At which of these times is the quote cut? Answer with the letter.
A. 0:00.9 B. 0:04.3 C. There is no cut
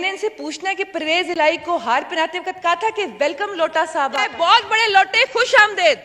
B